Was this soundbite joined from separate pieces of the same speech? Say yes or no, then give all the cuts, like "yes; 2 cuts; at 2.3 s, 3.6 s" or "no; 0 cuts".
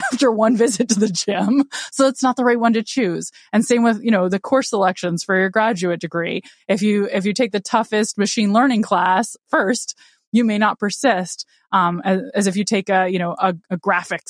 no; 0 cuts